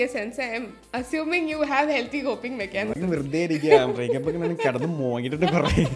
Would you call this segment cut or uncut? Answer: uncut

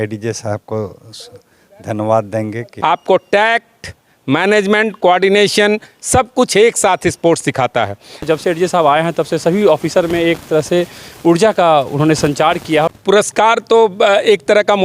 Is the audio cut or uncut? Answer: cut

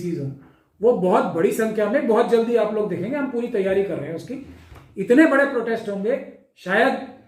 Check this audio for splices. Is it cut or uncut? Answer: uncut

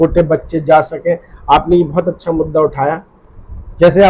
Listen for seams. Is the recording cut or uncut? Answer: cut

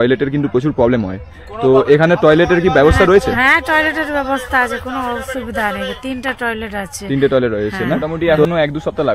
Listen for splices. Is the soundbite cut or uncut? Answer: cut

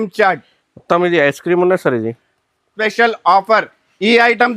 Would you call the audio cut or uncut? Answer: cut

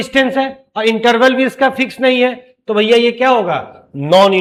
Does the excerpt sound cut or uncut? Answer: uncut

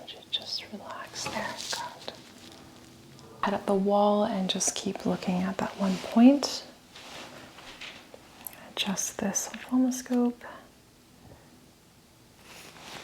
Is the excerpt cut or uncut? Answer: cut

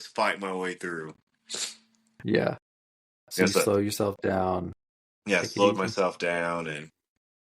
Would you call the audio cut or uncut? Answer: uncut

